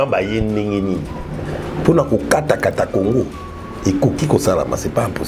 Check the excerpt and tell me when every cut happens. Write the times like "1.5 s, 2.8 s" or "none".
none